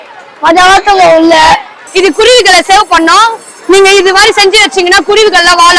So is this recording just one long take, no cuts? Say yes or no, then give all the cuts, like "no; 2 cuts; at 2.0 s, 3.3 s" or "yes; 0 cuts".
no; 1 cut; at 1.8 s